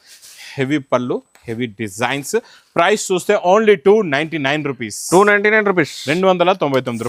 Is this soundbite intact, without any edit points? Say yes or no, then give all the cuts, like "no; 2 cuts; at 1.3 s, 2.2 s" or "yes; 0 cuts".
yes; 0 cuts